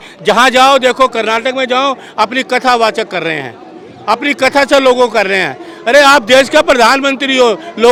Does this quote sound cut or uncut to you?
uncut